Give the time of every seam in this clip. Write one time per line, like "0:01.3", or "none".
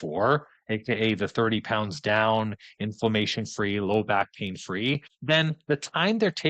none